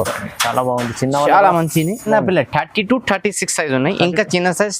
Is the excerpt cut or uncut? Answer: cut